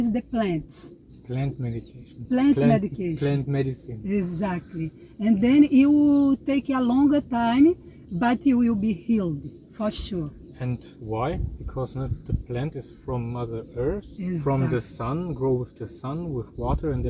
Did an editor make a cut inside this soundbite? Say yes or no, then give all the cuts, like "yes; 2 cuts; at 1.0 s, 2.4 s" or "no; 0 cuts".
no; 0 cuts